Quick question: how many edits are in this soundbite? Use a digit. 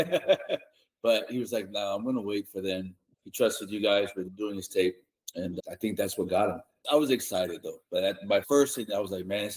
5